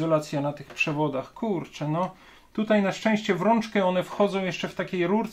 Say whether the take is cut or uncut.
uncut